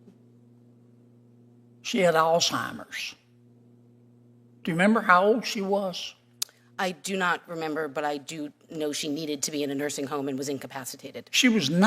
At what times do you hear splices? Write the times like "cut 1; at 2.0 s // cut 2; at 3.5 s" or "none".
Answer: none